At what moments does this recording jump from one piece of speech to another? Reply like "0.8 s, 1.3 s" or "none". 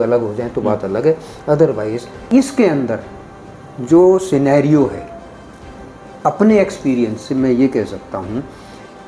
2.1 s